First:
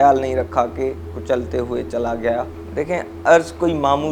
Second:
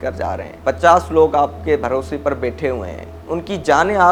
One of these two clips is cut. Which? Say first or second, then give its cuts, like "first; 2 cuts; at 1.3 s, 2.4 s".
first; 2 cuts; at 1.0 s, 2.5 s